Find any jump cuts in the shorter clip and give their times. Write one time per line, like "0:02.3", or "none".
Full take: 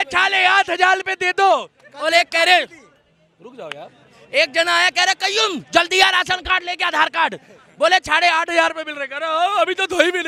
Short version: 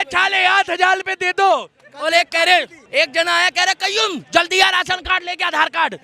0:02.8